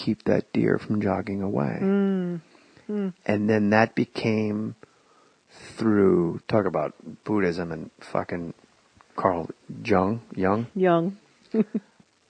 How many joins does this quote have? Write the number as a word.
zero